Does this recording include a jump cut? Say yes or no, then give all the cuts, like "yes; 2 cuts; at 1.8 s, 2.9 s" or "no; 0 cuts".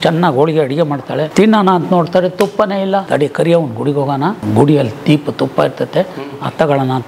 yes; 3 cuts; at 1.3 s, 3.1 s, 4.4 s